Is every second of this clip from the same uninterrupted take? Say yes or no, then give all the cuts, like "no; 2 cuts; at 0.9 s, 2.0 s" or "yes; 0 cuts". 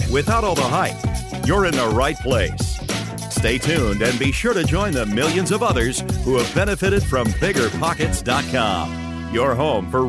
yes; 0 cuts